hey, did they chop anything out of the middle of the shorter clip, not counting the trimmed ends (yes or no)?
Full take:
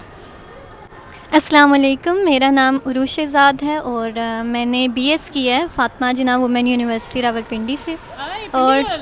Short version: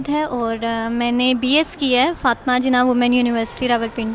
no